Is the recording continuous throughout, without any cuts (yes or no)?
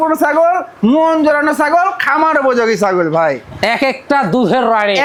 yes